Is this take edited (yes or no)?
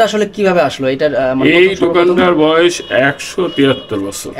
no